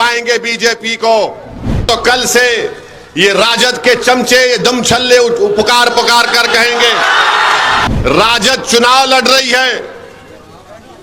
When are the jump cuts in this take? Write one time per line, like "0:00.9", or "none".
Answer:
0:01.8
0:07.9

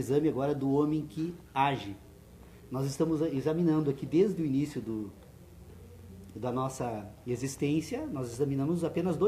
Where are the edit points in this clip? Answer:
0:00.9

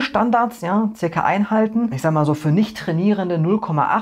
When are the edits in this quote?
0:02.0

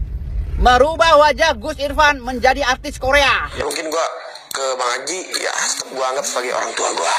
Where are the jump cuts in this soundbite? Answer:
0:03.5

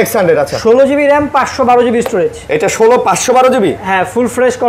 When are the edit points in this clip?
none

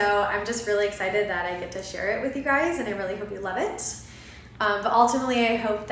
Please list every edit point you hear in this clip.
none

